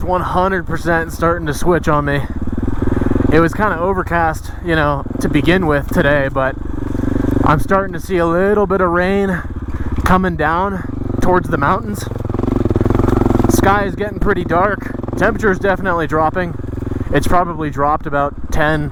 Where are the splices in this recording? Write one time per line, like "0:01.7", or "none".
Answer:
none

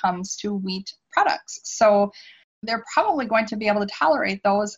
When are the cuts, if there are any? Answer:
none

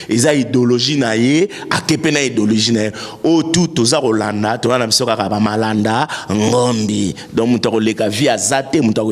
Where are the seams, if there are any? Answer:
none

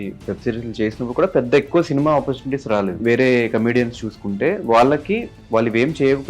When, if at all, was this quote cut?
0:03.0

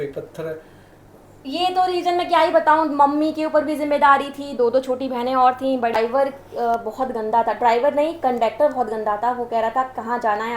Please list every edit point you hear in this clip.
0:05.9

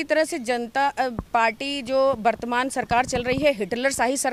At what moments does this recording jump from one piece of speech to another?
none

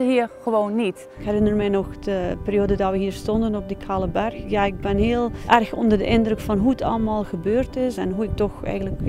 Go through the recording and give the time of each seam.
0:01.2
0:04.4
0:05.4
0:08.0

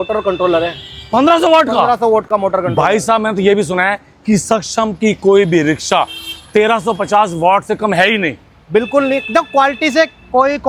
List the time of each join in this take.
none

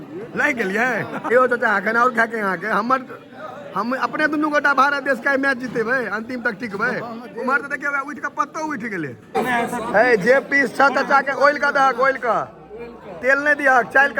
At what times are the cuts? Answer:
0:01.3
0:09.3

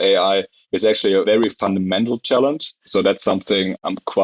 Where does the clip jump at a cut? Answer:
0:01.2
0:02.8

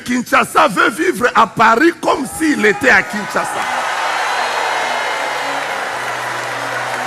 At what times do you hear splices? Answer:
none

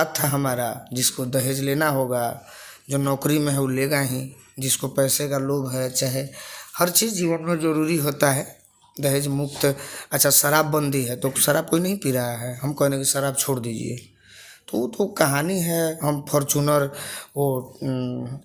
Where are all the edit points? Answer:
none

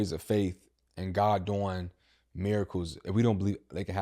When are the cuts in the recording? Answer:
0:03.1

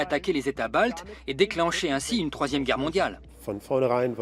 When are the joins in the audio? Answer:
0:03.2

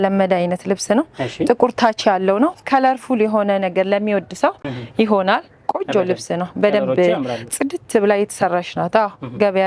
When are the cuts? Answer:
none

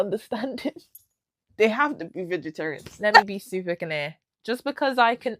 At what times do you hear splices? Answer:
0:03.3

